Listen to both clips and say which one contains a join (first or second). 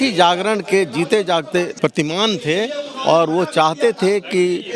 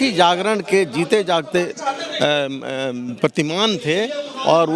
first